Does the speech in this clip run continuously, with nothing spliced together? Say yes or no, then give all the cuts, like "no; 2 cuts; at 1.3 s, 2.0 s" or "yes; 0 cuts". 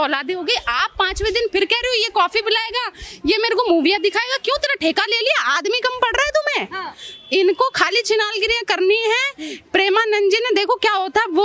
yes; 0 cuts